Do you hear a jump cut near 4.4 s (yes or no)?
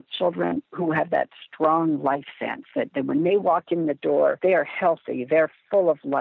yes